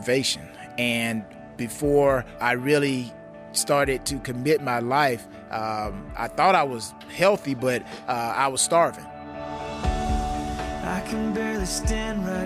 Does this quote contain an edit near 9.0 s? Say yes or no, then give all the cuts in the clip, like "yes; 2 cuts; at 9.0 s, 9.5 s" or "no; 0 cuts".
yes; 3 cuts; at 1.3 s, 2.3 s, 9.0 s